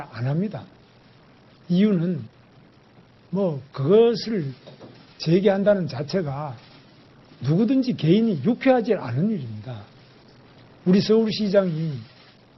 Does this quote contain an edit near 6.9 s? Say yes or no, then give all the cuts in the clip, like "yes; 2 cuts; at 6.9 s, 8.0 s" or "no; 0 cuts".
no; 1 cut; at 10.3 s